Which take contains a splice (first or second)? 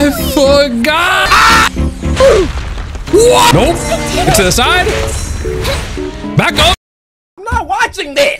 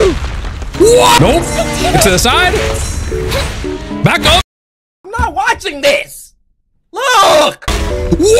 first